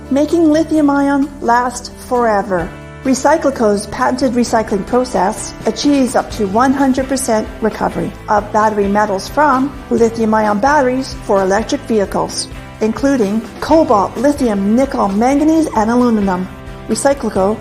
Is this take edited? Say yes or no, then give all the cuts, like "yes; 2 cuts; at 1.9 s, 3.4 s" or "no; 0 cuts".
yes; 1 cut; at 1.7 s